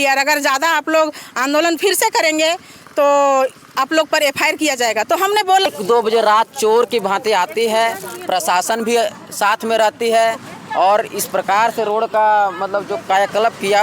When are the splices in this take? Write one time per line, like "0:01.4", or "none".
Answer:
0:05.7